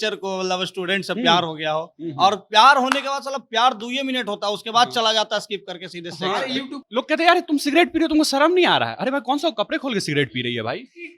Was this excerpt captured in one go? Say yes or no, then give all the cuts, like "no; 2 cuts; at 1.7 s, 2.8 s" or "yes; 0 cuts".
no; 1 cut; at 6.8 s